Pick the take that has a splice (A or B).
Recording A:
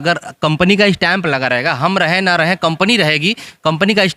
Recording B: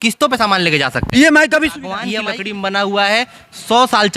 B